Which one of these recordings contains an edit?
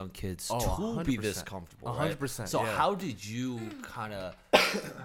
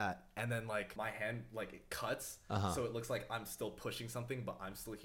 second; 1 cut; at 0.9 s

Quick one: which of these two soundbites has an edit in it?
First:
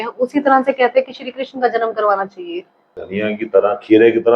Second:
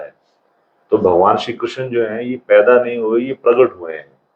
first; 1 cut; at 3.0 s

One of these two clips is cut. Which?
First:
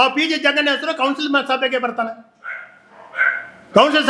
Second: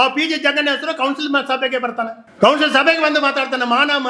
second; 1 cut; at 2.2 s

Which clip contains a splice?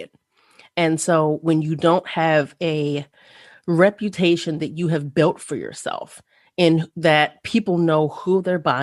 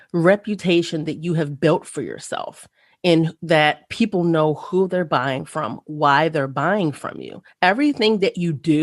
second; 1 cut; at 7.4 s

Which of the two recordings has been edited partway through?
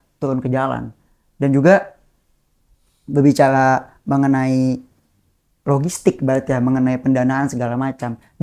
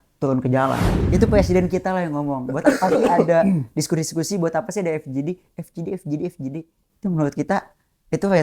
second; 1 cut; at 0.9 s

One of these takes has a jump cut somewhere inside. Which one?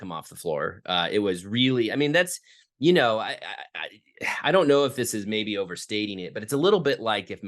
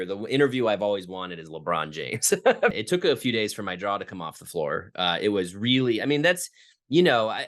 second; 1 cut; at 2.7 s

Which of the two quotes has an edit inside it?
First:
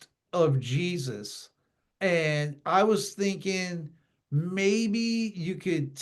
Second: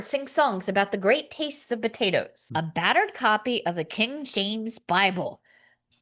second; 1 cut; at 2.4 s

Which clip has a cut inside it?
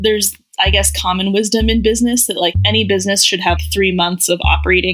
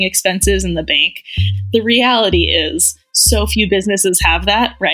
second; 1 cut; at 1.5 s

